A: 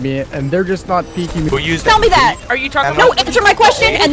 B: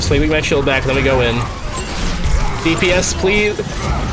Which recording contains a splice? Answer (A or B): A